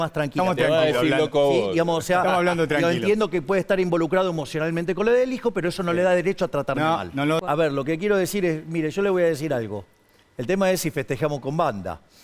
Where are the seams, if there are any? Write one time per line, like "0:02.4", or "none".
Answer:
0:07.4